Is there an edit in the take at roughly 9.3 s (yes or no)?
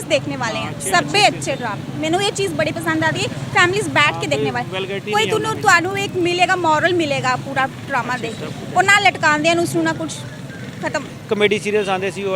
no